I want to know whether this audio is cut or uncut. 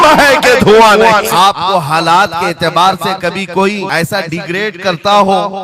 cut